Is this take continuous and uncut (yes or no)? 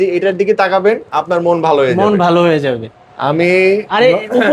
no